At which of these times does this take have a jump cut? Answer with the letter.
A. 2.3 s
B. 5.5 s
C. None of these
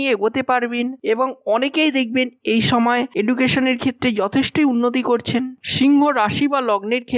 B